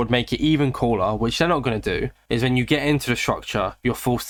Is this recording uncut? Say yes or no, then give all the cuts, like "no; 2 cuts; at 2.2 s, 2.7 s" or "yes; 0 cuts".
yes; 0 cuts